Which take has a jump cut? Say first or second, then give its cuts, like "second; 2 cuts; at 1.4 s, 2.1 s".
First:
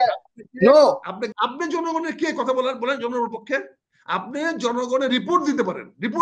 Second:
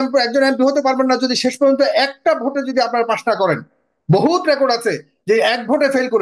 first; 1 cut; at 1.2 s